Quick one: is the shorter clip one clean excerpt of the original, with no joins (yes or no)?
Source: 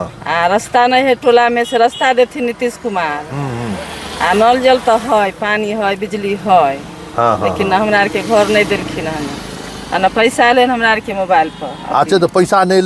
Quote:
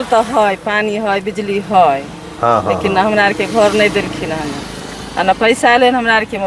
yes